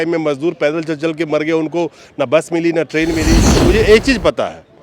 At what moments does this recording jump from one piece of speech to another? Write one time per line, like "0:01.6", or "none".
0:03.6